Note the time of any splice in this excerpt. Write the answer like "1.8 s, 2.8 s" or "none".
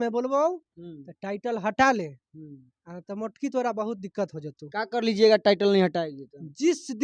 none